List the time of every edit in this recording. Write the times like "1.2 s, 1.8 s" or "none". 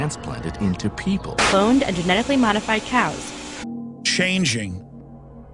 none